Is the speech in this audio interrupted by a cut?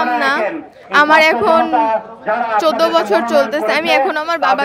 no; 0 cuts

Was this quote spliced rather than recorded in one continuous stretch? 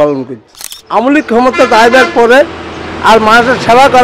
yes; 1 cut; at 1.0 s

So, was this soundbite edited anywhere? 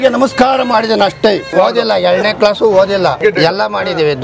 yes; 2 cuts; at 1.5 s, 3.2 s

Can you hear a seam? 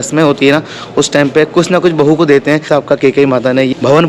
no; 0 cuts

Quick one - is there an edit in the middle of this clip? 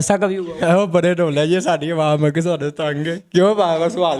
no; 0 cuts

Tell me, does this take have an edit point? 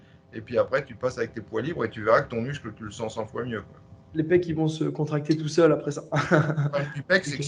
no; 0 cuts

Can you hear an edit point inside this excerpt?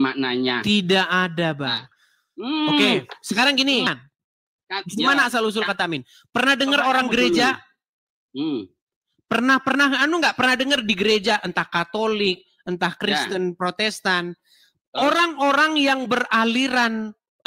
yes; 1 cut; at 3.9 s

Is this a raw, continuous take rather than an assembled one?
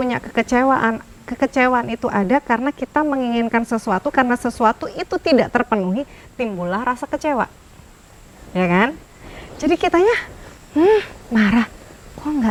yes; 0 cuts

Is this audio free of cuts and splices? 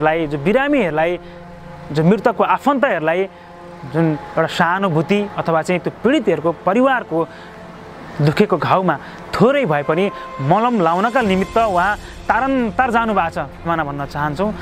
no; 1 cut; at 13.6 s

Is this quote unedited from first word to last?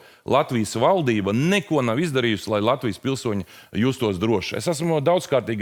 yes; 0 cuts

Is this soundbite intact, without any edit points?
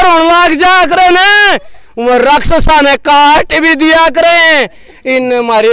yes; 0 cuts

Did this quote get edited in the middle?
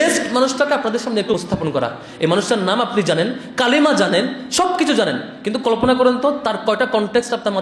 yes; 1 cut; at 1.3 s

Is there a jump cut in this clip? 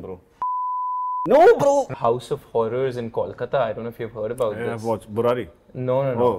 yes; 1 cut; at 1.9 s

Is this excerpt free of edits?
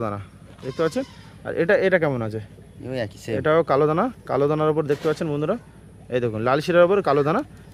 yes; 0 cuts

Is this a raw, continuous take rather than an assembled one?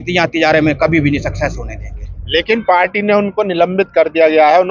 yes; 0 cuts

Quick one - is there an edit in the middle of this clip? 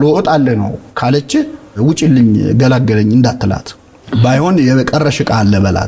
no; 0 cuts

